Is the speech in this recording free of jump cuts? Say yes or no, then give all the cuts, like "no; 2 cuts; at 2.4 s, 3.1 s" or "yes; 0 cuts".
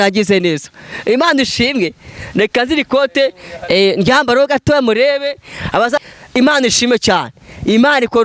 no; 1 cut; at 6.0 s